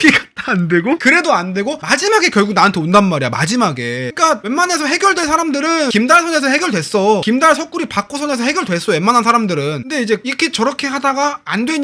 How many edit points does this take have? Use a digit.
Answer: 0